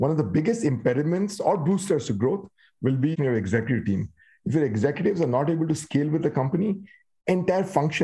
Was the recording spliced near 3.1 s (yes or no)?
yes